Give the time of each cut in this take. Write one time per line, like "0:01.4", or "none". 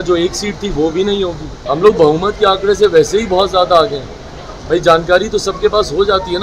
0:01.5